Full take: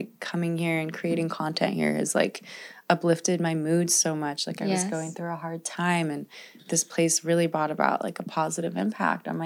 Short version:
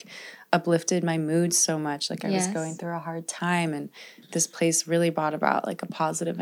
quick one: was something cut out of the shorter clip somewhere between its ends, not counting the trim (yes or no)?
no